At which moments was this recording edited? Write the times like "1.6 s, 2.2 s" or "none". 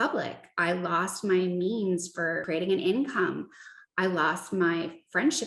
2.4 s